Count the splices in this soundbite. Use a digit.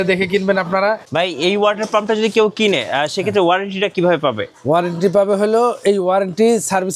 1